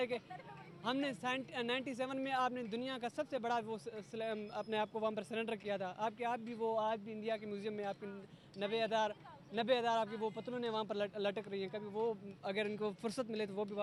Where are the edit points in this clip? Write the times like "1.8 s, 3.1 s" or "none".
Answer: none